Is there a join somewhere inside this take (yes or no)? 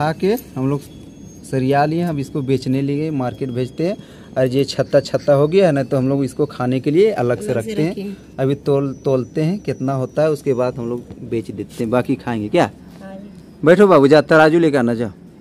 no